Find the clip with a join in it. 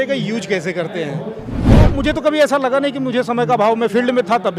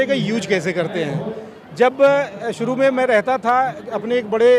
first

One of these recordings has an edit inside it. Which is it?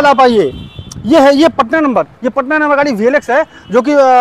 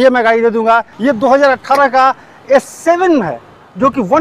second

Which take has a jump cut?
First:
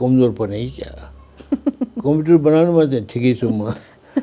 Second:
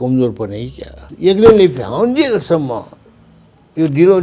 second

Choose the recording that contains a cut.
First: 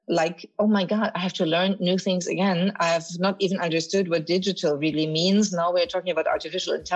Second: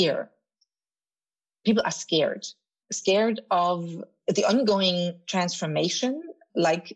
second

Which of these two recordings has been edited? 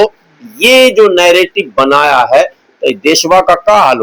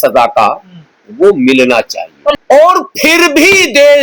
second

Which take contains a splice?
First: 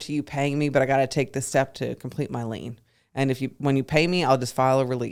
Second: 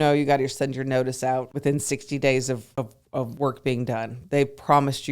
second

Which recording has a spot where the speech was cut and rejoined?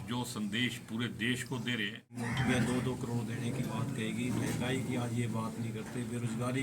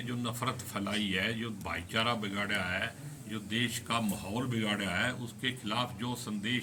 first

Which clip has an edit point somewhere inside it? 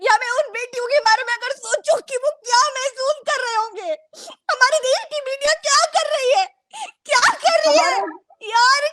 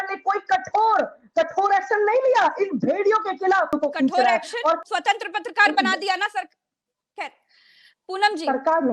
second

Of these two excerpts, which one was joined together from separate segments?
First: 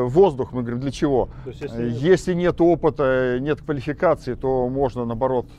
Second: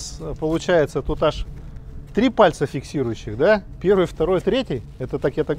first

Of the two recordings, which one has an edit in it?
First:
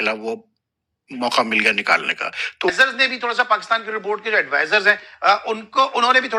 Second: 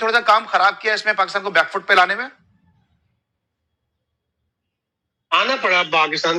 first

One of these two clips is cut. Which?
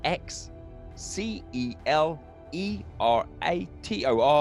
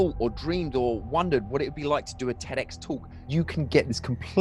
second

